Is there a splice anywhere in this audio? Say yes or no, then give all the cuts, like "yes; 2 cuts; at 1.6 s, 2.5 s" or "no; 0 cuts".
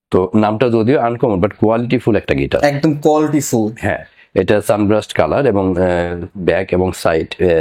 no; 0 cuts